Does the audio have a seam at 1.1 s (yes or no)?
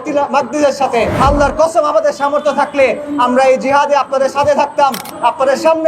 yes